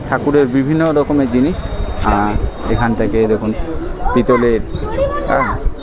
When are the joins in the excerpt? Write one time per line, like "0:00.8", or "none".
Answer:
none

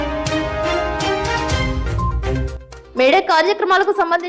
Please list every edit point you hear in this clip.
none

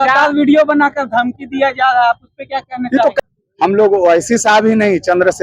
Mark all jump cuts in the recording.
0:03.2

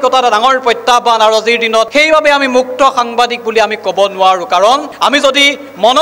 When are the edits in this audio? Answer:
none

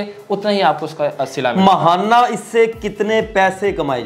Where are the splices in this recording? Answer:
none

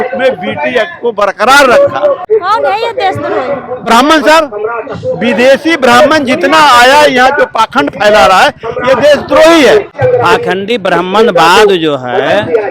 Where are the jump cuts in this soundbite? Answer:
0:02.2
0:09.9

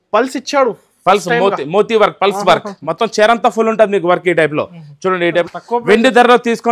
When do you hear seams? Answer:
0:05.5

